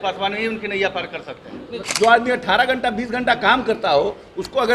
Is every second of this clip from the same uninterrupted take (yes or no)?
no